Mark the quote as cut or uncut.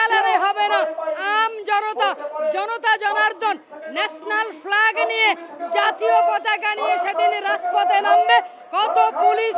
uncut